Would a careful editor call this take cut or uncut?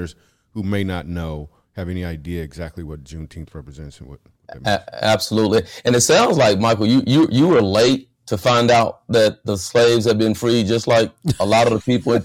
uncut